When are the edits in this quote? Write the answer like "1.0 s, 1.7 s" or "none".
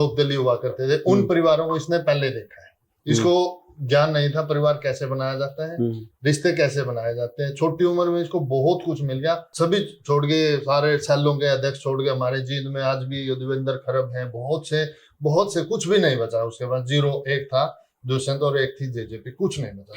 9.5 s